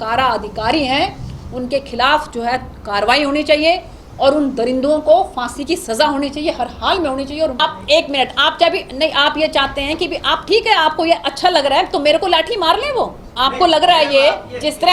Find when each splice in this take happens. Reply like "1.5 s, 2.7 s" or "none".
7.6 s